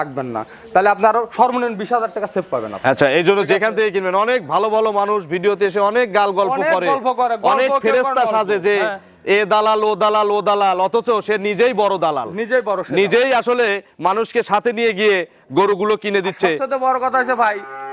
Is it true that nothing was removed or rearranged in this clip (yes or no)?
yes